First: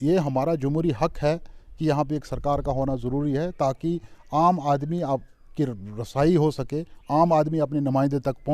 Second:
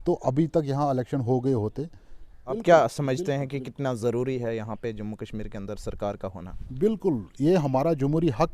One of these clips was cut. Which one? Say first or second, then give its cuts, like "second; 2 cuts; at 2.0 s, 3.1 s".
second; 1 cut; at 2.6 s